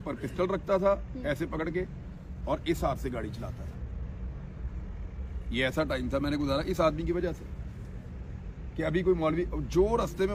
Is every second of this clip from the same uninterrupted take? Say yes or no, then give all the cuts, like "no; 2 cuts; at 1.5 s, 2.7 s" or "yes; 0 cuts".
yes; 0 cuts